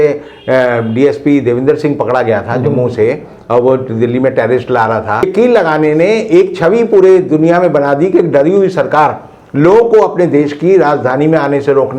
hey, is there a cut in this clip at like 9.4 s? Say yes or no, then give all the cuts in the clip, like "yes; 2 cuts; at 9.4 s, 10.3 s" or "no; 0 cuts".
no; 1 cut; at 5.3 s